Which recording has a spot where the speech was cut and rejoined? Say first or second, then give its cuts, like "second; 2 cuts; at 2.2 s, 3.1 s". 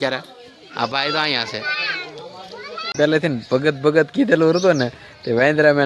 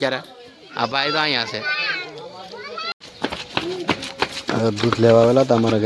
first; 1 cut; at 2.9 s